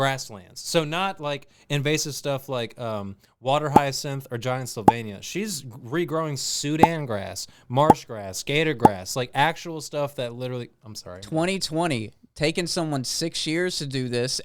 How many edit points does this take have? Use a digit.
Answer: 0